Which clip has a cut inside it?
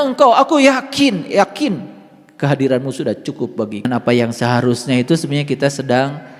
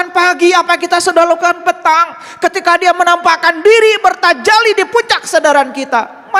first; 1 cut; at 3.9 s

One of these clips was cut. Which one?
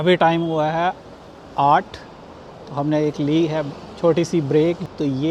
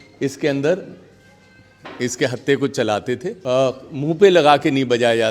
second; 1 cut; at 3.3 s

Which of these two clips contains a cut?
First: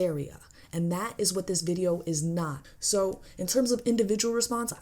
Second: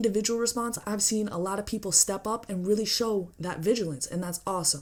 first; 1 cut; at 2.6 s

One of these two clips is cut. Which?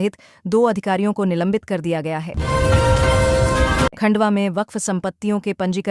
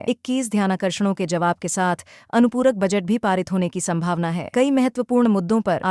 first; 2 cuts; at 2.3 s, 3.9 s

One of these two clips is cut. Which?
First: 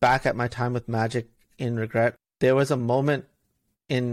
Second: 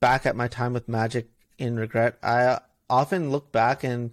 first; 1 cut; at 2.2 s

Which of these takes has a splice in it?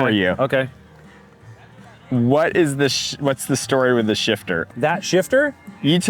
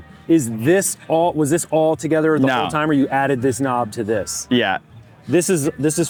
first; 1 cut; at 4.6 s

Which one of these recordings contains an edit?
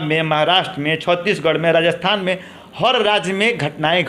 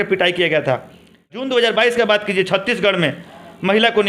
second; 1 cut; at 1.4 s

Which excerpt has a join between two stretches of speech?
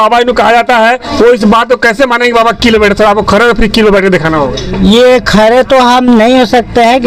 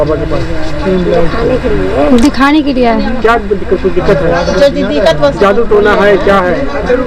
first; 1 cut; at 1.1 s

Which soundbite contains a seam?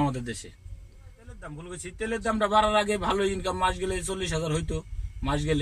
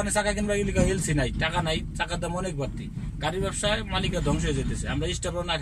first; 1 cut; at 1.6 s

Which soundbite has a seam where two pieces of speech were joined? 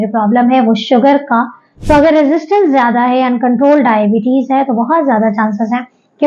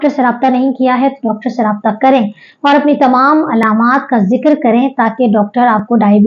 first; 1 cut; at 1.7 s

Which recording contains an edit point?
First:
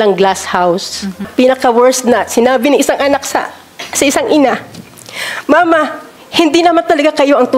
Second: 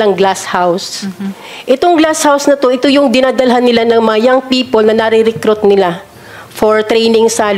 first; 1 cut; at 1.2 s

